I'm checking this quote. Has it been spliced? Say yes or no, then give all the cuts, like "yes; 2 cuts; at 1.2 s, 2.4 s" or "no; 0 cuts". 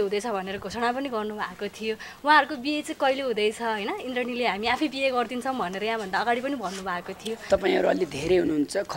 yes; 1 cut; at 7.4 s